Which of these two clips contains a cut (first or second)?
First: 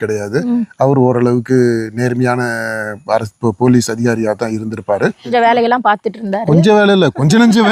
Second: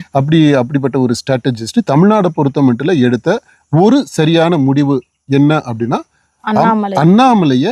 first